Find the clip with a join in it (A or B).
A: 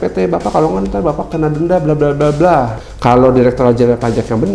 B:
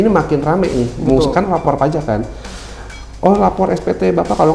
A